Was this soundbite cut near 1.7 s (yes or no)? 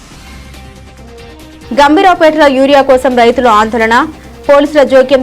yes